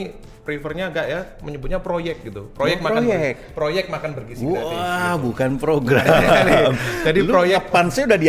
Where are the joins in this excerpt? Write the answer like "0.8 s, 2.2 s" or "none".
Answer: none